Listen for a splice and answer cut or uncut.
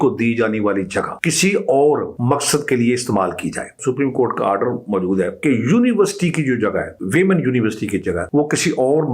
cut